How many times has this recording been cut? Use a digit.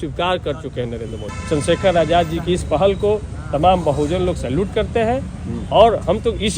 1